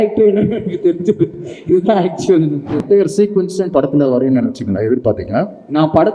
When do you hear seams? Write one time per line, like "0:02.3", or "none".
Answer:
0:02.8